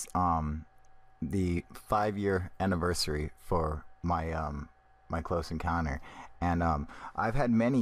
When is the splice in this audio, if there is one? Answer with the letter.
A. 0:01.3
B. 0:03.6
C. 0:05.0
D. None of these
D